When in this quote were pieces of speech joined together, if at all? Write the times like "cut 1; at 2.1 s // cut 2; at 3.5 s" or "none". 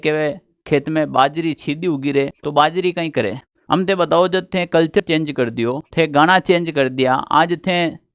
cut 1; at 2.4 s // cut 2; at 3.5 s // cut 3; at 5.8 s